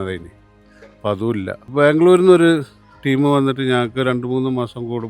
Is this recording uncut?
no; 1 cut; at 1.6 s

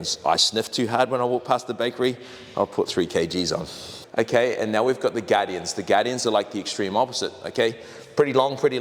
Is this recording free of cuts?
yes; 0 cuts

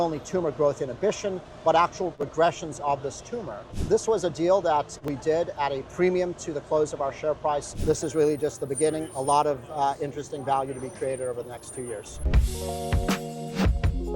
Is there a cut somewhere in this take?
yes; 5 cuts; at 2.2 s, 3.7 s, 5.0 s, 7.7 s, 12.2 s

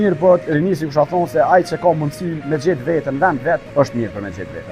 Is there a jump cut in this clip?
yes; 1 cut; at 3.7 s

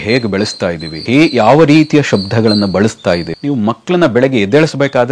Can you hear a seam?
yes; 2 cuts; at 0.9 s, 3.3 s

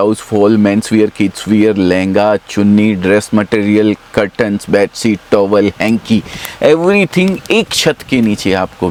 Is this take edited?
no; 0 cuts

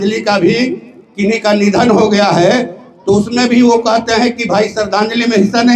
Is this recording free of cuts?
yes; 0 cuts

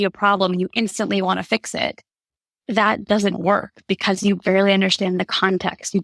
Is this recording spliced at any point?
no; 0 cuts

